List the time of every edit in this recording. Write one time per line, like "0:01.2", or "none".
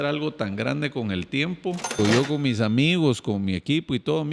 0:01.9